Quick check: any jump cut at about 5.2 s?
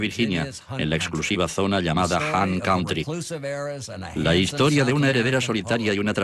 yes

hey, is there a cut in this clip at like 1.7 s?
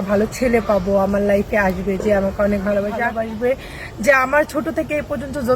no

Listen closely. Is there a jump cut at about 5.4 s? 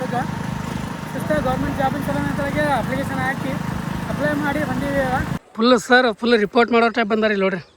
yes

